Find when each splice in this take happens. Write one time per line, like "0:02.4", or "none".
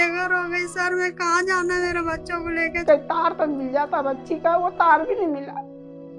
0:02.8